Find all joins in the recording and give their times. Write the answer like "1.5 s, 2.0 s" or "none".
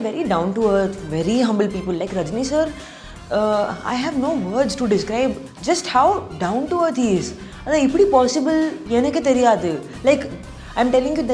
5.5 s